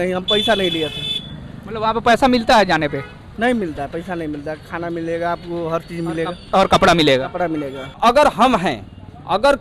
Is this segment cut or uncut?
cut